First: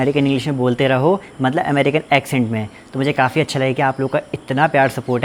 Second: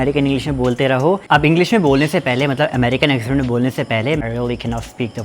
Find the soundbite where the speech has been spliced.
second; 2 cuts; at 1.2 s, 4.2 s

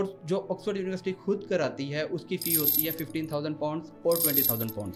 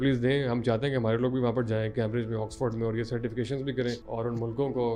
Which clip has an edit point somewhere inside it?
second; 1 cut; at 4.0 s

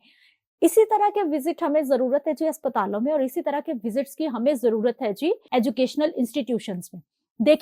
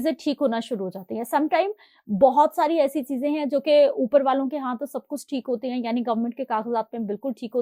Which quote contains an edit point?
first; 1 cut; at 5.4 s

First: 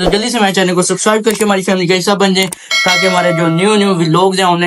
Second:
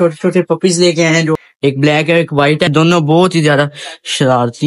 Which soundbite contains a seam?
second; 2 cuts; at 1.4 s, 2.7 s

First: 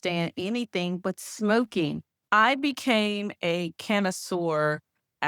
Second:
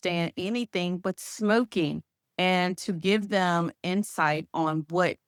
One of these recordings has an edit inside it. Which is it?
first; 1 cut; at 2.1 s

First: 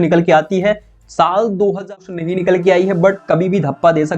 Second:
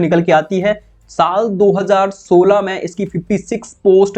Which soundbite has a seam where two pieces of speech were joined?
first; 1 cut; at 2.1 s

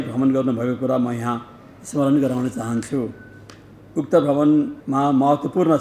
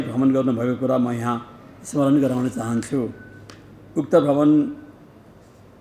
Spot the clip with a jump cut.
first; 1 cut; at 4.8 s

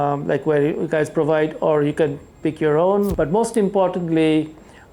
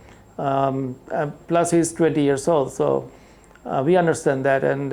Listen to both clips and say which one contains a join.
first; 1 cut; at 3.1 s

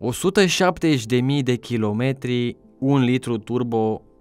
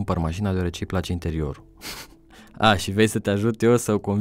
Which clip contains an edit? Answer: first; 1 cut; at 2.7 s

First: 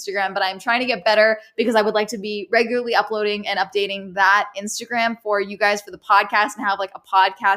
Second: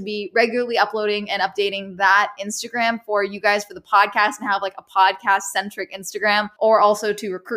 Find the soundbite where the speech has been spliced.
second; 1 cut; at 6.5 s

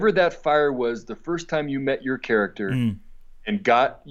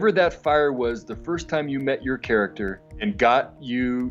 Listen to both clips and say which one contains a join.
second; 1 cut; at 2.6 s

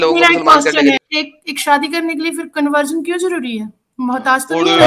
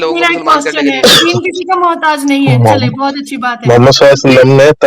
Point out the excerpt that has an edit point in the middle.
first; 1 cut; at 1.0 s

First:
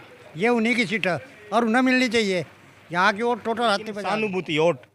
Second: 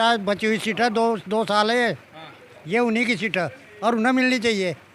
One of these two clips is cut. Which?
first; 1 cut; at 4.0 s

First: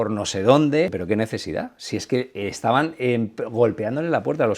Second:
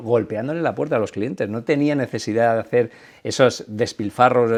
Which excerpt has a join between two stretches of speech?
first; 1 cut; at 1.0 s

